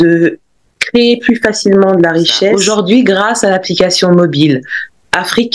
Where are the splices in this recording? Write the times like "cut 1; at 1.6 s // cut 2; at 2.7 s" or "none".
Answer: cut 1; at 2.6 s